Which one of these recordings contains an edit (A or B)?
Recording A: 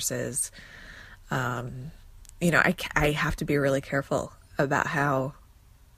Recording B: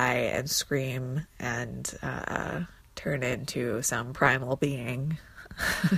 B